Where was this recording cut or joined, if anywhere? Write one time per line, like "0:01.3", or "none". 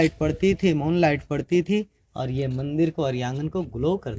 none